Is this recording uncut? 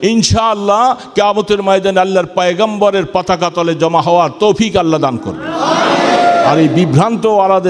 yes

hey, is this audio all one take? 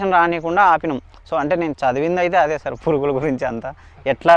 yes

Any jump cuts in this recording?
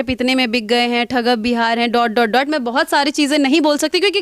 no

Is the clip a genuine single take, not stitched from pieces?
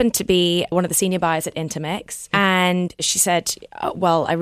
no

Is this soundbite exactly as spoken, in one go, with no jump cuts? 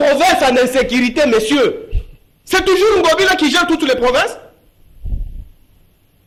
yes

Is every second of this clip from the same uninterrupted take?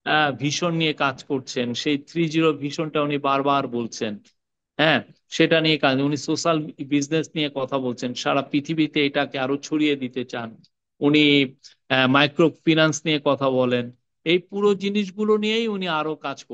no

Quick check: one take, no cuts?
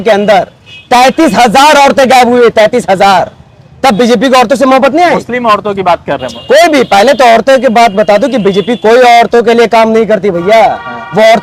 yes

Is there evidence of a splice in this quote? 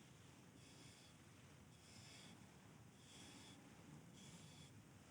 no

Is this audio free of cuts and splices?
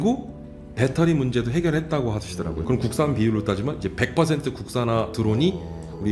no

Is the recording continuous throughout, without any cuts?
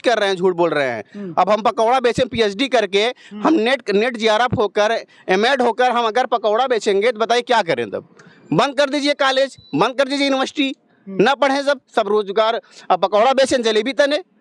yes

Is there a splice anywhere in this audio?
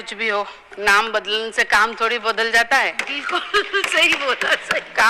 no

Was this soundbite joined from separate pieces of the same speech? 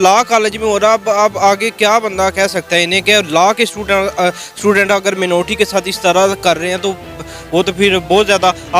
no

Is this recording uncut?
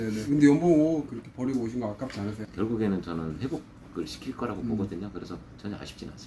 no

